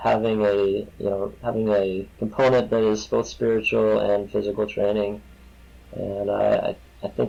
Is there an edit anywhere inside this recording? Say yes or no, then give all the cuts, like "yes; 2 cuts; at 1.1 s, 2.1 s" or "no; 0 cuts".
no; 0 cuts